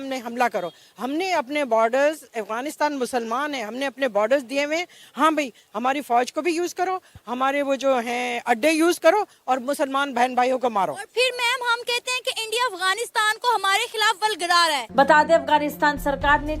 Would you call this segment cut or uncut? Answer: cut